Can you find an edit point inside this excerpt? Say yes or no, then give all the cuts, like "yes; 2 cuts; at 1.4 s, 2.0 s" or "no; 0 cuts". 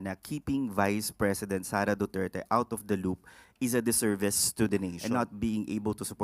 yes; 1 cut; at 5.0 s